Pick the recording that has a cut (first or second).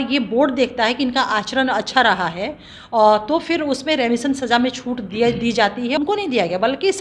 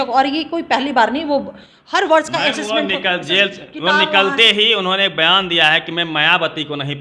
first